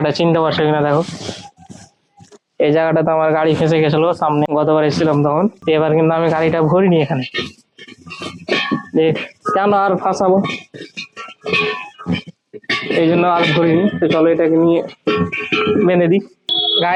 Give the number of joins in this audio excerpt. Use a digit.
0